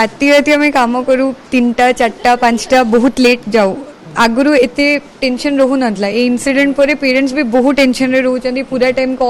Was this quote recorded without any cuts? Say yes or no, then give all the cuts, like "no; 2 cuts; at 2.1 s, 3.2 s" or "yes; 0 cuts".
yes; 0 cuts